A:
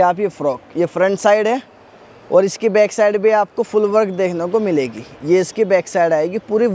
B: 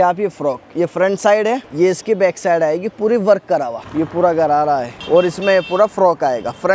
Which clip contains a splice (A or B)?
B